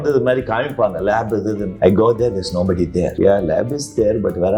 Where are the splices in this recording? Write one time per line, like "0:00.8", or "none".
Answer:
0:01.7
0:03.1